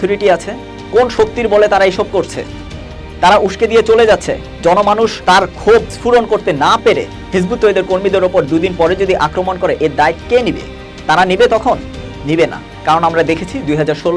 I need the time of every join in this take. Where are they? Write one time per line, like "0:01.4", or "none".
0:05.2
0:05.9